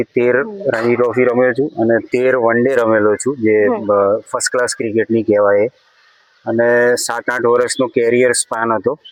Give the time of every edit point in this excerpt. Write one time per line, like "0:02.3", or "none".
none